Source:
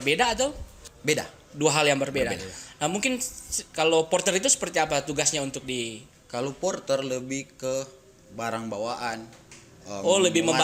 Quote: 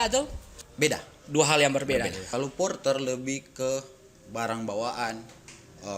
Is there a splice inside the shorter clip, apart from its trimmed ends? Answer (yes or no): yes